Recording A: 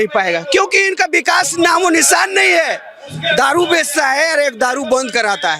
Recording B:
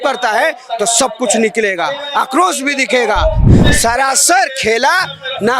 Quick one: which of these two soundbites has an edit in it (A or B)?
B